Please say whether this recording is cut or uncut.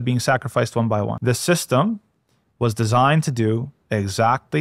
cut